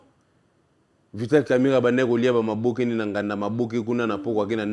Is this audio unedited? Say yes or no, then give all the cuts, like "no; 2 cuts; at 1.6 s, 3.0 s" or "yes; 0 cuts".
yes; 0 cuts